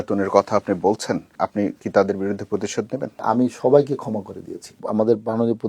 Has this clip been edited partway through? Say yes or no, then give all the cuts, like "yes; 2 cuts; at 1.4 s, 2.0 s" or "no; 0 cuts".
yes; 3 cuts; at 1.3 s, 3.2 s, 4.8 s